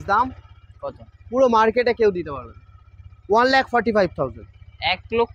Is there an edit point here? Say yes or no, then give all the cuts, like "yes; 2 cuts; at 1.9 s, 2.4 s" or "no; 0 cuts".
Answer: no; 0 cuts